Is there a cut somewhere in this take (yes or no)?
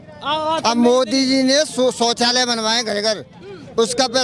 no